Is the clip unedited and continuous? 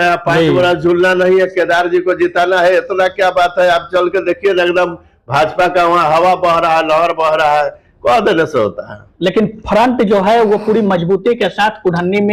yes; 0 cuts

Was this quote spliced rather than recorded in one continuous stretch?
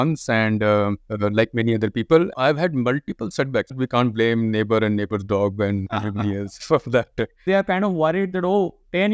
yes; 2 cuts; at 3.8 s, 7.4 s

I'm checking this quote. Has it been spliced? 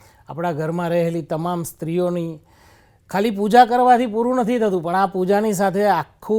no; 0 cuts

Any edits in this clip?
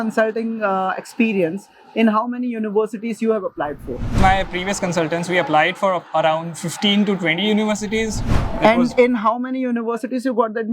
yes; 2 cuts; at 4.1 s, 8.2 s

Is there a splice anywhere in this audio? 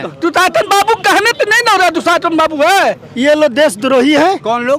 yes; 1 cut; at 3.0 s

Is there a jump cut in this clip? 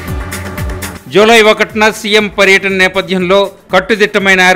yes; 1 cut; at 0.9 s

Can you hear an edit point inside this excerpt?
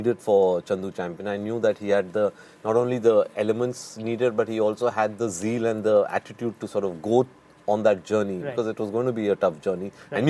no; 0 cuts

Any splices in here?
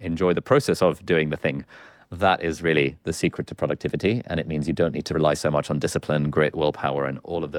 yes; 1 cut; at 5.1 s

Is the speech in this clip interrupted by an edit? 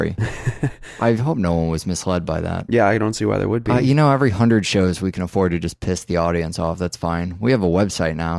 yes; 1 cut; at 6.3 s

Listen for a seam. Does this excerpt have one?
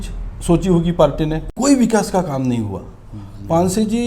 yes; 1 cut; at 1.5 s

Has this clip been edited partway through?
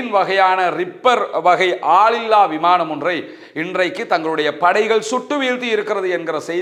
no; 0 cuts

